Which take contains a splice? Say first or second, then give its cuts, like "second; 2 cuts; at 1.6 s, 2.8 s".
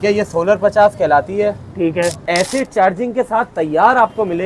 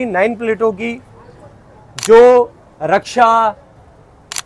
first; 1 cut; at 2.2 s